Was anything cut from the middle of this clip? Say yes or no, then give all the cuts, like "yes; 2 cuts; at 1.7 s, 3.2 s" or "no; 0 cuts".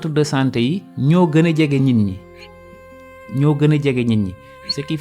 no; 0 cuts